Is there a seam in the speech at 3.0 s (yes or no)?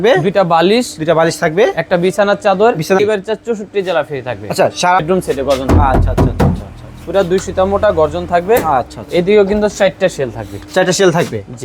yes